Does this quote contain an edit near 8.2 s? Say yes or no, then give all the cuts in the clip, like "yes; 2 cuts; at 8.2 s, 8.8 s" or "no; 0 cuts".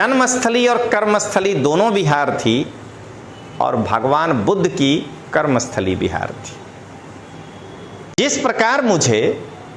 yes; 1 cut; at 8.2 s